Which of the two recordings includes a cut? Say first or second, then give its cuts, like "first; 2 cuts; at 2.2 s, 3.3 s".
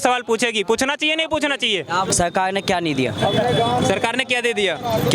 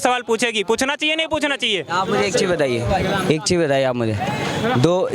first; 1 cut; at 2.1 s